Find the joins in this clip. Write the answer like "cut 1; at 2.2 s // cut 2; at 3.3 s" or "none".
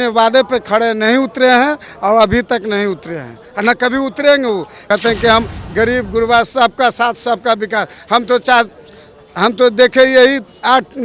cut 1; at 4.8 s